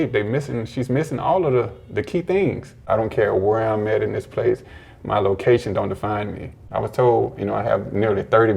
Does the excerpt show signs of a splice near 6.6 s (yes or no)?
yes